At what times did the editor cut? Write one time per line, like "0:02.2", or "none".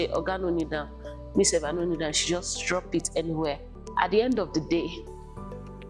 none